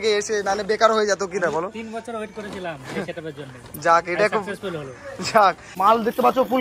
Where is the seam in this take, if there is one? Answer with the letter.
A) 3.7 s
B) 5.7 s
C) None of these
B